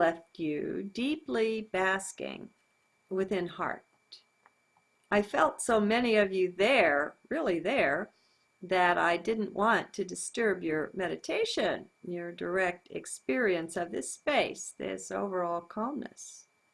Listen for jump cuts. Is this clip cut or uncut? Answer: cut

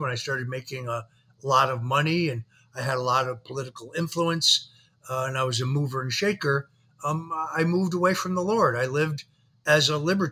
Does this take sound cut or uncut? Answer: uncut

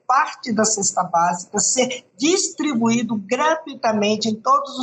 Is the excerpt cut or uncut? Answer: uncut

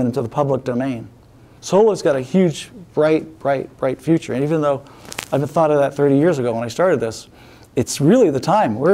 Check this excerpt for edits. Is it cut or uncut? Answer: cut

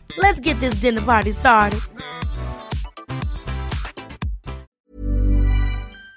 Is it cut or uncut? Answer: cut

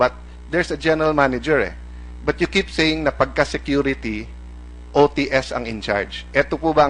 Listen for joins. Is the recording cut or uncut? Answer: uncut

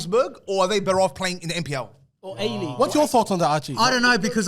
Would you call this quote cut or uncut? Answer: cut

